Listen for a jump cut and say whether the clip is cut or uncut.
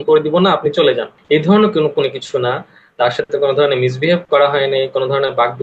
uncut